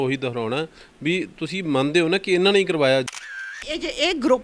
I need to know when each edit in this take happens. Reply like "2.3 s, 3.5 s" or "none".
3.1 s